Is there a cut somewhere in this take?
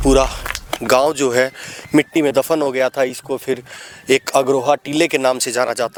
no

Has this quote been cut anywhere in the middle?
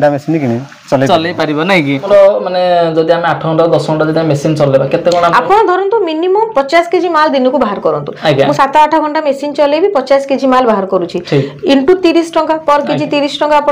yes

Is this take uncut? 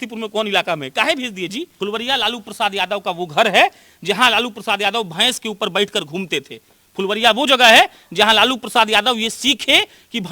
no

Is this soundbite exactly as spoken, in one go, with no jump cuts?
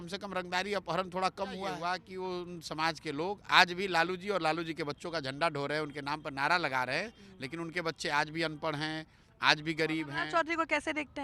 no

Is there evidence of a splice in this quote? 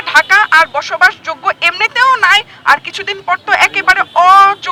no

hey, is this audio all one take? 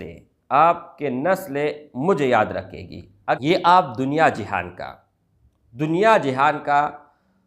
no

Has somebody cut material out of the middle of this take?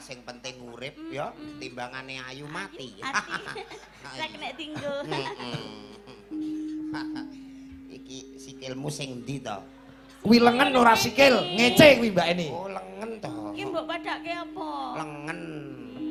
no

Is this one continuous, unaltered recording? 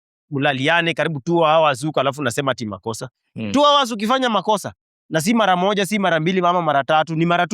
yes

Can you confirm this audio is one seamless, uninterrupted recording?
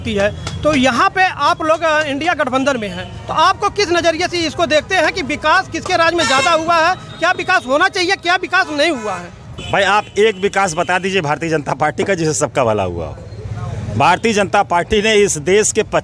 yes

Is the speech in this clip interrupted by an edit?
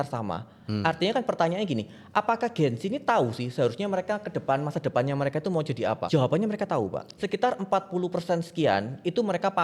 yes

